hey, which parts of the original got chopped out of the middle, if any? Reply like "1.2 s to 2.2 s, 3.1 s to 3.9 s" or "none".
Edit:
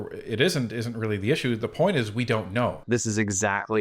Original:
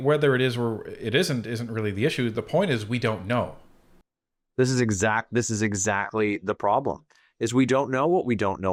3.6 s to 5.3 s